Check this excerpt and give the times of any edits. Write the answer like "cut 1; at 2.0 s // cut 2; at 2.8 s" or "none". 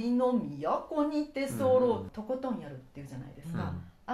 cut 1; at 2.1 s